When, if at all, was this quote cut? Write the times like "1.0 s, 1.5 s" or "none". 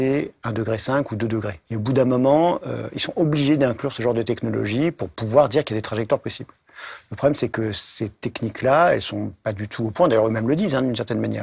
1.6 s